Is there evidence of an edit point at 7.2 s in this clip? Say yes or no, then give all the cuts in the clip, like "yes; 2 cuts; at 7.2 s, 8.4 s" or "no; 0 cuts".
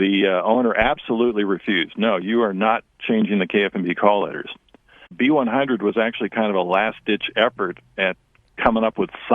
no; 1 cut; at 5.1 s